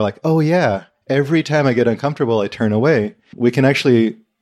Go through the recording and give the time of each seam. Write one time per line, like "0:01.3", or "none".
none